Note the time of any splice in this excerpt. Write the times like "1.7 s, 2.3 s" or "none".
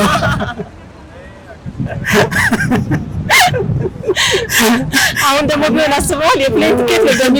none

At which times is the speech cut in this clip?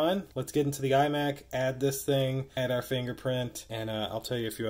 none

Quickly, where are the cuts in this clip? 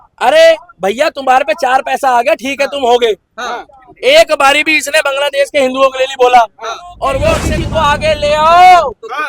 7.5 s

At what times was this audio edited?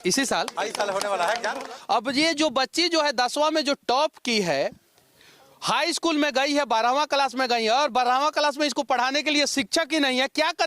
1.6 s

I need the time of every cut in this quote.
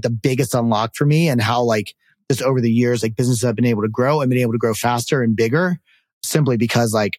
none

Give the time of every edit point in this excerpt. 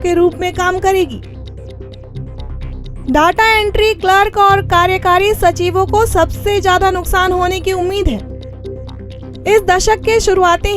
none

